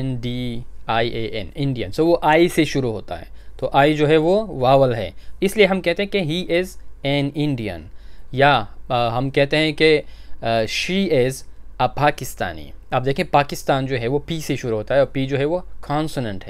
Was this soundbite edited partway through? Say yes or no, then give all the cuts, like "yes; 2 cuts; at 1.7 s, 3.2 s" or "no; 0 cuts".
no; 0 cuts